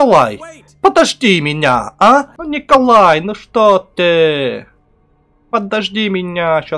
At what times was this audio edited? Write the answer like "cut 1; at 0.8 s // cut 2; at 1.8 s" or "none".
cut 1; at 2.4 s